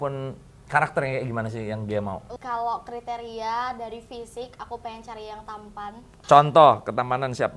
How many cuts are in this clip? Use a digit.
2